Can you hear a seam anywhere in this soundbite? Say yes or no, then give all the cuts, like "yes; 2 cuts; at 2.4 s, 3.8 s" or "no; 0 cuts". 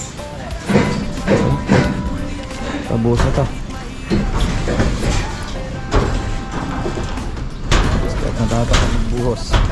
no; 0 cuts